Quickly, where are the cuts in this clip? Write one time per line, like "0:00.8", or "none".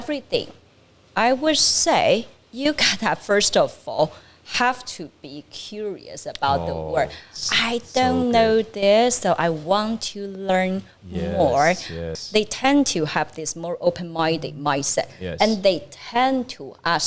0:12.1